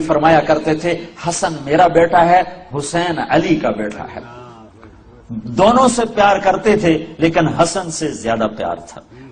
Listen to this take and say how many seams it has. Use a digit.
1